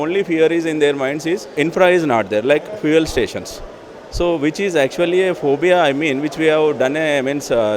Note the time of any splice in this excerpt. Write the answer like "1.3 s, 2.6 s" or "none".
1.5 s